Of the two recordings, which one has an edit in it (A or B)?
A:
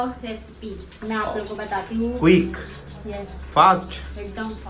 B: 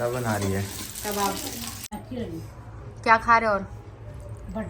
B